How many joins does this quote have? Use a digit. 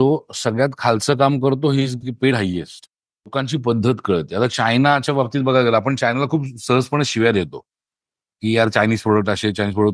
1